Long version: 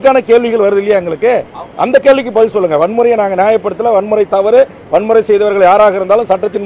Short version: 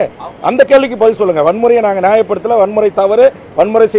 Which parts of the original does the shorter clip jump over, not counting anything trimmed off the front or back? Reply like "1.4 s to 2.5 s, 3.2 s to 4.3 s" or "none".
none